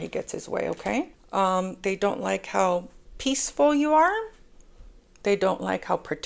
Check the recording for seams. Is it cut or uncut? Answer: cut